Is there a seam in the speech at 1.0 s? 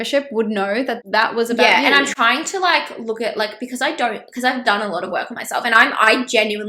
yes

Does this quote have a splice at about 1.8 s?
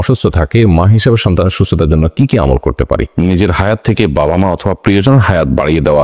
no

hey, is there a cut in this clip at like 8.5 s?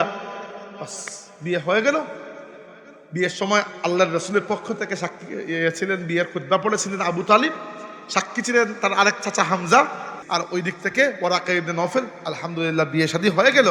no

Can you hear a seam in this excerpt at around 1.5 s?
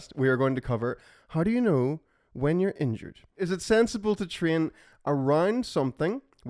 no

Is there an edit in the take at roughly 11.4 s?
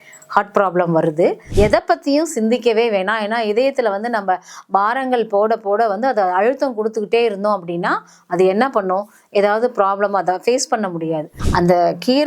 yes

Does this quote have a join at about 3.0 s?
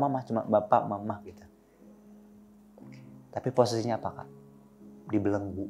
yes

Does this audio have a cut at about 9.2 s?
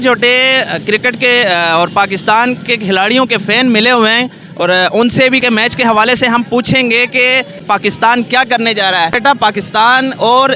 yes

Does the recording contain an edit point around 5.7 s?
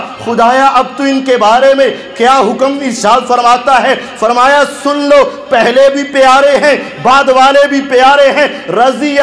no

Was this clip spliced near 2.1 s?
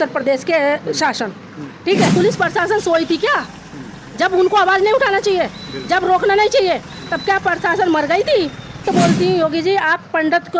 yes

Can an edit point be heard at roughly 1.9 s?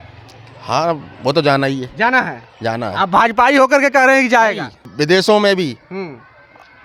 no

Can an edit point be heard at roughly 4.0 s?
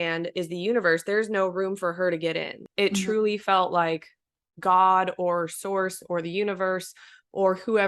no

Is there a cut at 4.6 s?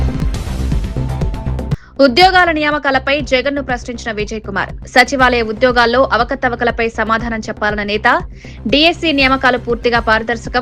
no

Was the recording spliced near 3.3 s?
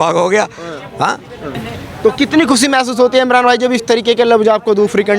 no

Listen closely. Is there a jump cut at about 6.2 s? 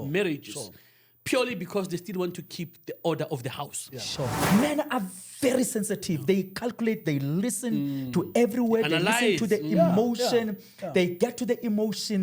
no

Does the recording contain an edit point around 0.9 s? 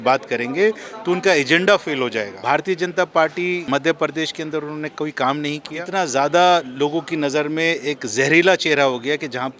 no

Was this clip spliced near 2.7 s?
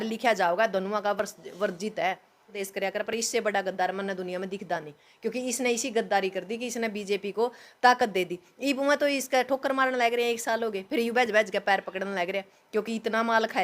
yes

